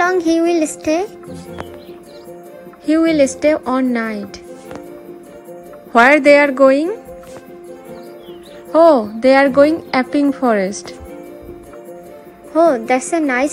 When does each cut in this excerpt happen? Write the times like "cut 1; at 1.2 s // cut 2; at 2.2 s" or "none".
cut 1; at 2.5 s // cut 2; at 5.3 s // cut 3; at 8.0 s // cut 4; at 11.3 s